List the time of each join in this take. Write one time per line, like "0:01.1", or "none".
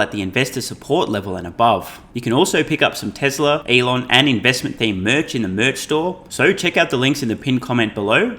0:02.0
0:03.6
0:06.2